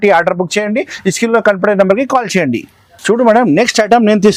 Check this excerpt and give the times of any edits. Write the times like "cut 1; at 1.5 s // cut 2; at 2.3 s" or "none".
none